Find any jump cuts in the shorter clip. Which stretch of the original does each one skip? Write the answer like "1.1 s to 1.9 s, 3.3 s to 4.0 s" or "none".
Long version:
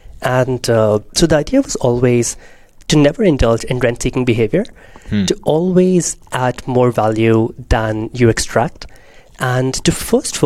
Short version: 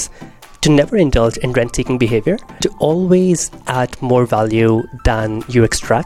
4.9 s to 5.2 s